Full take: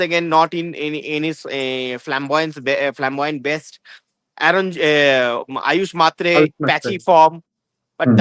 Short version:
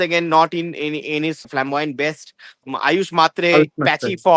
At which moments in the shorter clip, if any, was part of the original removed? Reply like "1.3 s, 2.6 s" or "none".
1.5 s, 2.7 s